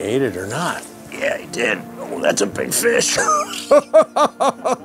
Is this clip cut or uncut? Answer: uncut